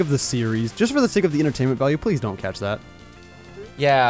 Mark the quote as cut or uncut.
uncut